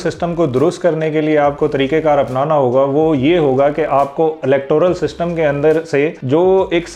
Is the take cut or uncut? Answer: uncut